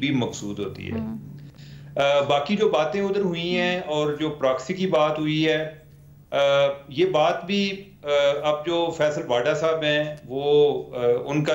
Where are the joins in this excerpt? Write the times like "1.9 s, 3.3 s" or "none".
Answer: none